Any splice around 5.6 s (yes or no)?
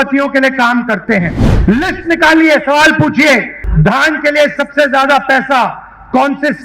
no